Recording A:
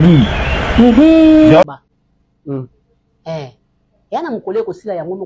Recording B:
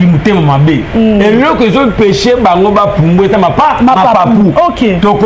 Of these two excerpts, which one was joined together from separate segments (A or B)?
A